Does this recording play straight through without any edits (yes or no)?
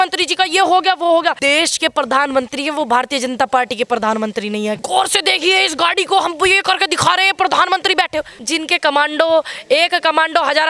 no